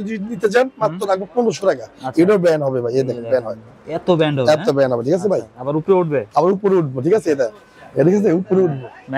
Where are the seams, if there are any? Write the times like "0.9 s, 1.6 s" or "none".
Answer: none